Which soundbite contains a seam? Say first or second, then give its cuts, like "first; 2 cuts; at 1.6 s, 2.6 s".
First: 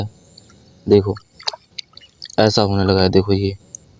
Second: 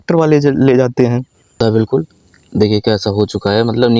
second; 1 cut; at 1.6 s